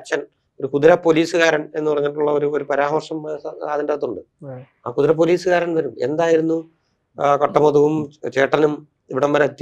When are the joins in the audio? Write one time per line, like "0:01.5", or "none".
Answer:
none

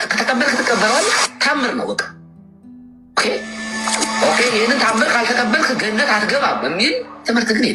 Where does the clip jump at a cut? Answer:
none

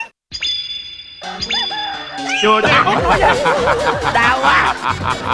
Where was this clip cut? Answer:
none

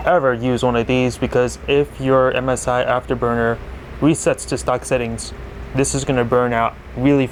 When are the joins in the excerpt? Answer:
none

